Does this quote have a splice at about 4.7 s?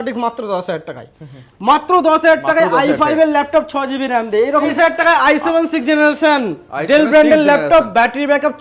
yes; 1 cut; at 4.7 s

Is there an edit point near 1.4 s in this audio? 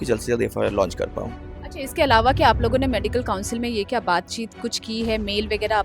no; 0 cuts

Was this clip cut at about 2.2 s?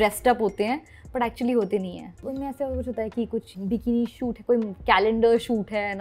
yes; 1 cut; at 2.2 s

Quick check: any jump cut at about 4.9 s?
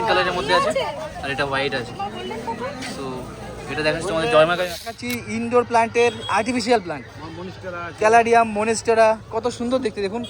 yes; 1 cut; at 4.9 s

